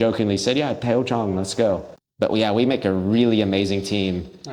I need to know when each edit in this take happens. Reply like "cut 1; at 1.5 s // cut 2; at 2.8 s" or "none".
cut 1; at 2.0 s